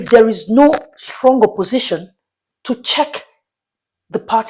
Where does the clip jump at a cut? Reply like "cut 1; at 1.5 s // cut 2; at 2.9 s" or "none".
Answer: none